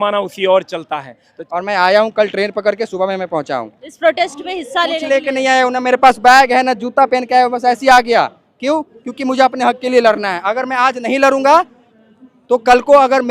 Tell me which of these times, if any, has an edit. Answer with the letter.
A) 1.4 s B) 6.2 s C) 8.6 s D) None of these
A